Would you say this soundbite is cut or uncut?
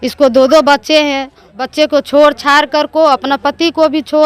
cut